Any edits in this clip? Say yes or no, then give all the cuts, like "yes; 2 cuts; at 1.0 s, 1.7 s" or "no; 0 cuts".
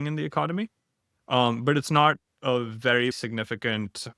yes; 1 cut; at 3.1 s